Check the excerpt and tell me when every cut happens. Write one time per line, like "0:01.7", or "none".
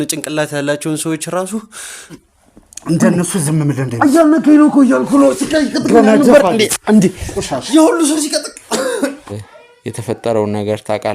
0:02.1
0:09.5